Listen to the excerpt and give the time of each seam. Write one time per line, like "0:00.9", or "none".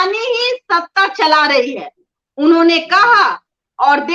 none